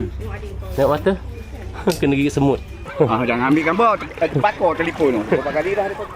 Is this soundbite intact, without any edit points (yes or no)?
no